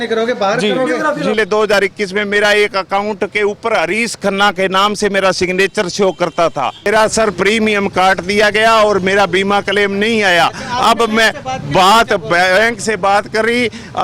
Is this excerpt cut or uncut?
cut